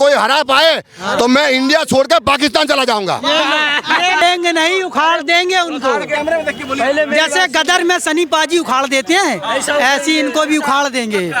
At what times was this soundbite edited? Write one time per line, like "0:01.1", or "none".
0:04.2

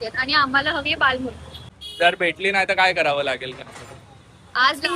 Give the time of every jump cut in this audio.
0:01.5

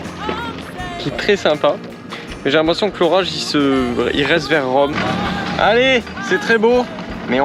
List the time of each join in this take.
0:04.9

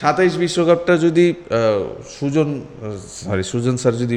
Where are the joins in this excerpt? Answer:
none

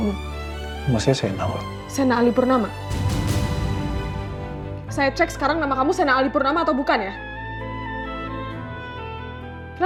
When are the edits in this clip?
none

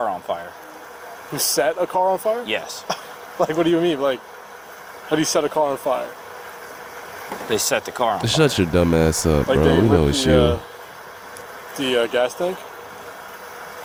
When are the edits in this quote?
none

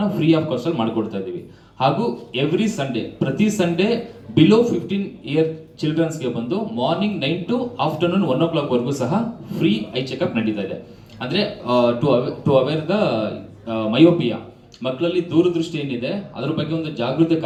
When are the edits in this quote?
none

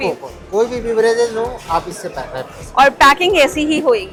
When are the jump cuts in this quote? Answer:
none

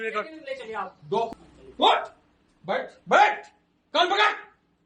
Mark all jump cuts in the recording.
0:01.3

